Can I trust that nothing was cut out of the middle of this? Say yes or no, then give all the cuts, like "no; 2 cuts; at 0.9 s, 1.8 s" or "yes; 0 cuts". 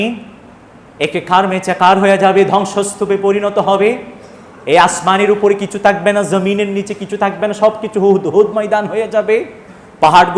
yes; 0 cuts